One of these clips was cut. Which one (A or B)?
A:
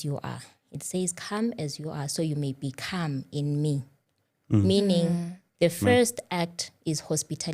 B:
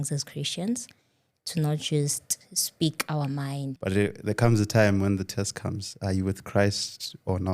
B